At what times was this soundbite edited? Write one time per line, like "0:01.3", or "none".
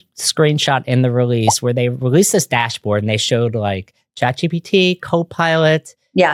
none